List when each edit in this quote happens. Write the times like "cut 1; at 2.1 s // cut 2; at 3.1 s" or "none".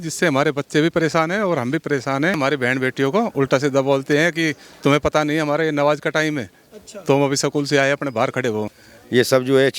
cut 1; at 2.4 s // cut 2; at 8.7 s